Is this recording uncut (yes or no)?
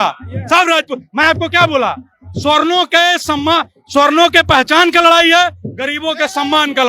yes